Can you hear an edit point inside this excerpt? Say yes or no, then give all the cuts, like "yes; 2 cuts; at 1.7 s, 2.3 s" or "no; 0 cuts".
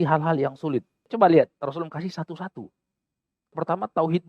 yes; 2 cuts; at 1.1 s, 3.5 s